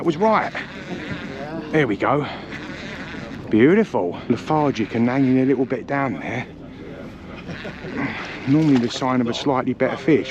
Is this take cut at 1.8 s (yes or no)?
no